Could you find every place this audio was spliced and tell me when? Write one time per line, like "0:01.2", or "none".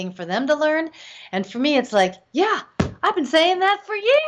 none